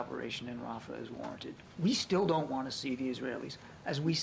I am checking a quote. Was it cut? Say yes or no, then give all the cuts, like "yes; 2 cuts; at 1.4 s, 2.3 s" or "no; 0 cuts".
yes; 1 cut; at 2.9 s